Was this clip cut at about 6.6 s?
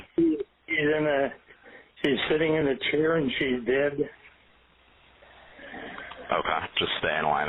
yes; 1 cut; at 6.6 s

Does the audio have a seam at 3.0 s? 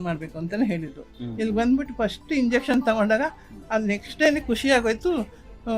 no; 1 cut; at 1.2 s

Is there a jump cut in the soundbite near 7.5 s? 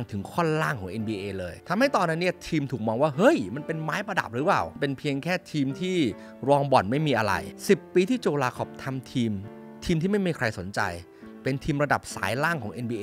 yes; 1 cut; at 7.5 s

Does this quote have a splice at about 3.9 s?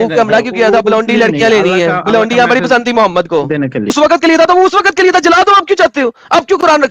yes; 1 cut; at 3.9 s

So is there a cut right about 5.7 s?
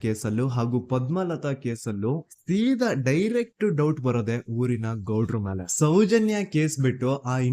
yes; 1 cut; at 5.7 s

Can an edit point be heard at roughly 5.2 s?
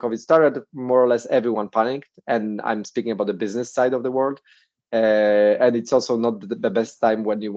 no; 0 cuts

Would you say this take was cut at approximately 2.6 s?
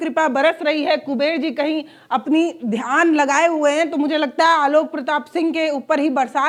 no; 0 cuts

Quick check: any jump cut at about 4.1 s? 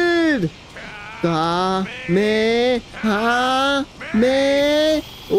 no; 0 cuts

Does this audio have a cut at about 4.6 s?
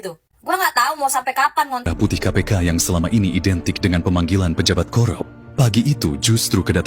no; 1 cut; at 1.9 s

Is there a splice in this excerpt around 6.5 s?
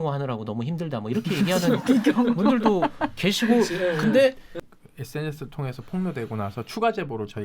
no; 1 cut; at 4.5 s

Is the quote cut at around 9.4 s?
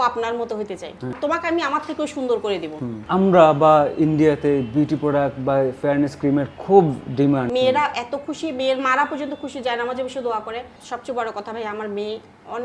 no; 4 cuts; at 1.2 s, 3.0 s, 7.5 s, 10.7 s

